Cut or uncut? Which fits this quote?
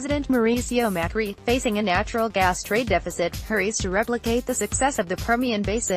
uncut